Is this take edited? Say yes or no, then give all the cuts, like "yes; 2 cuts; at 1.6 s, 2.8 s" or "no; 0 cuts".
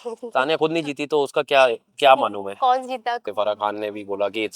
yes; 1 cut; at 3.3 s